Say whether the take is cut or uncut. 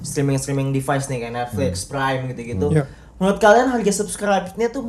uncut